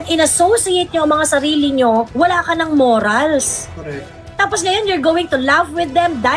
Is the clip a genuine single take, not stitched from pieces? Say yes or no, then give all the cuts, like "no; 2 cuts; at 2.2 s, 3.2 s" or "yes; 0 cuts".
no; 1 cut; at 2.1 s